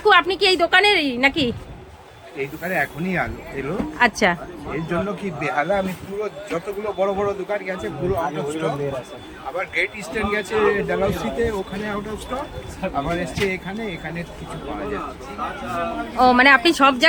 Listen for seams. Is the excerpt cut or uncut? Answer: uncut